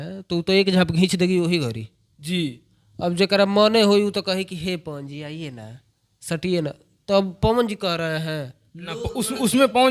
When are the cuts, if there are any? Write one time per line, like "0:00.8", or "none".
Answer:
none

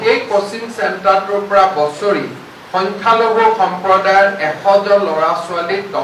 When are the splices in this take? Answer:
none

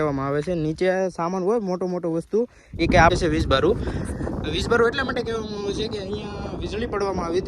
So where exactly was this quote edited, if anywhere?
0:03.1

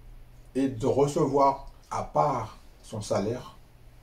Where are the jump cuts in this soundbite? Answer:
0:01.7

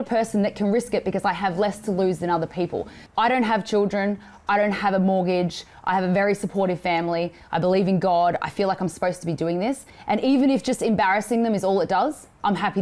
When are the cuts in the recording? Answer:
0:03.0
0:09.9

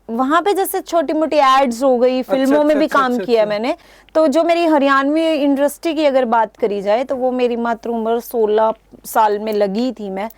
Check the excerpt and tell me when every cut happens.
none

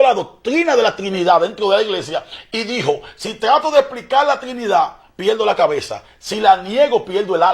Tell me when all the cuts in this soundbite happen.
none

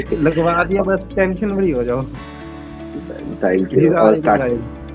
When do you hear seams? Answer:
none

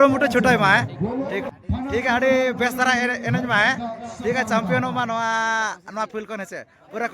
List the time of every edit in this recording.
0:01.5

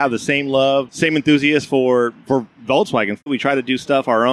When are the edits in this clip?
0:00.9
0:03.2

